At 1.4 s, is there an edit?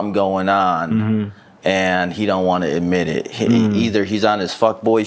no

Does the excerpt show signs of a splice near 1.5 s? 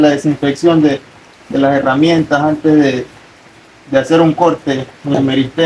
no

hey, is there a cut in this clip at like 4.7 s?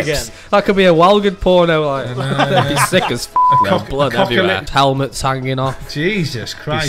yes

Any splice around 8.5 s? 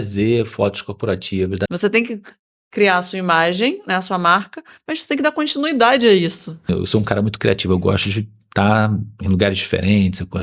no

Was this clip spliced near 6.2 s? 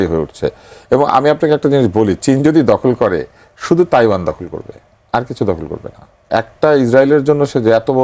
yes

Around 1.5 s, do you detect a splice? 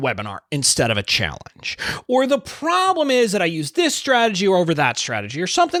no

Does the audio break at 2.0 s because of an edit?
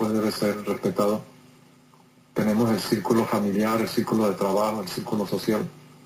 no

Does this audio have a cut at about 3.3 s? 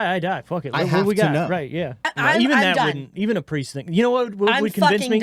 no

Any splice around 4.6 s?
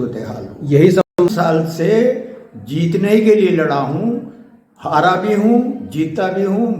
no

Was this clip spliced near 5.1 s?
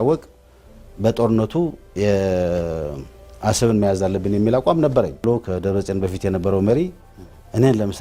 yes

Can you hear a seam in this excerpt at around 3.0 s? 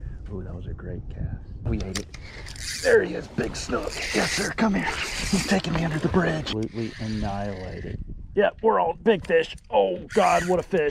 no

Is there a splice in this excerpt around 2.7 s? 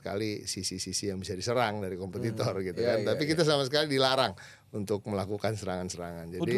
no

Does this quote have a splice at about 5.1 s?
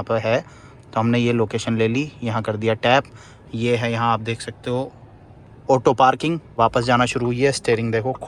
no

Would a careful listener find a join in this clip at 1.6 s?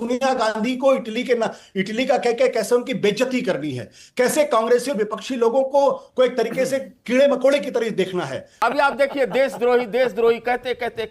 no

